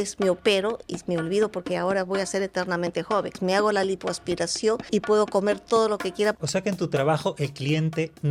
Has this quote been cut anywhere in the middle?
yes; 3 cuts; at 3.3 s, 4.8 s, 6.4 s

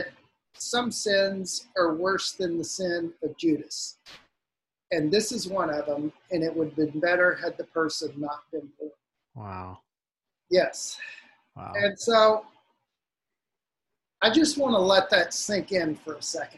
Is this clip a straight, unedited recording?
yes; 0 cuts

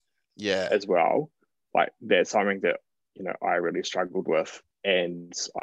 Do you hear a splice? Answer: yes; 1 cut; at 4.6 s

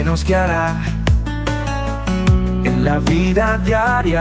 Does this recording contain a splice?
no; 0 cuts

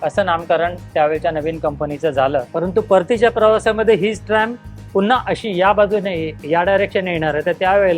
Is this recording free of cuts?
no; 1 cut; at 2.5 s

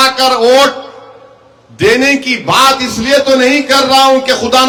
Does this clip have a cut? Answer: no; 0 cuts

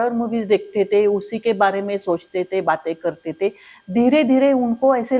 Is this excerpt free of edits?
yes; 0 cuts

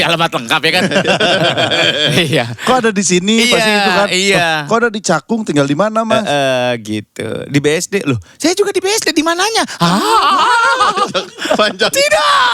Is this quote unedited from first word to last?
yes; 0 cuts

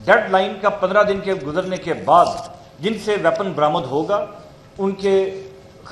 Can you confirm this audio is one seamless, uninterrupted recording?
yes; 0 cuts

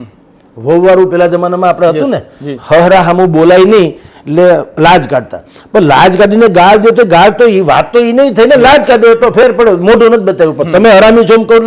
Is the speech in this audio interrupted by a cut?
no; 0 cuts

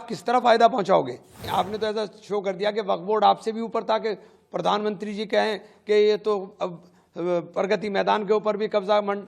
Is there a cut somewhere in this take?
yes; 1 cut; at 1.4 s

